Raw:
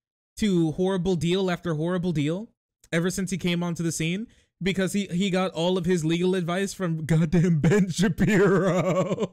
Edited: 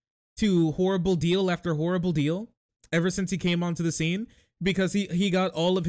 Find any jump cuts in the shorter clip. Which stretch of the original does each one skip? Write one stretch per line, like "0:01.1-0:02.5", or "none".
none